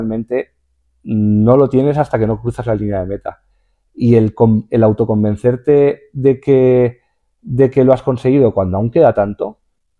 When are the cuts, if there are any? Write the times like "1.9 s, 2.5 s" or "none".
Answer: none